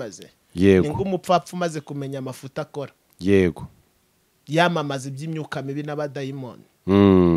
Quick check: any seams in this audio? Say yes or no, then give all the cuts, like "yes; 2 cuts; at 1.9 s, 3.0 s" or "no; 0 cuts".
no; 0 cuts